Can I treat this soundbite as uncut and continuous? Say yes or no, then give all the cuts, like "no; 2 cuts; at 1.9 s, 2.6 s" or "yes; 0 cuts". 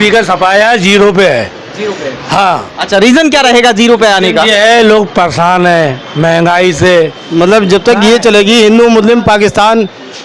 no; 1 cut; at 7.2 s